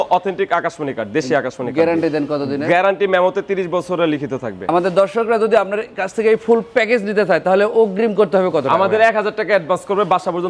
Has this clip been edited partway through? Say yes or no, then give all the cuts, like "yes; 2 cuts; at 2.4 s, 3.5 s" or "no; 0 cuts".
yes; 1 cut; at 4.7 s